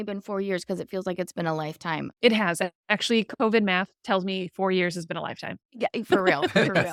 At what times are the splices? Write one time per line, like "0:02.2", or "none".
none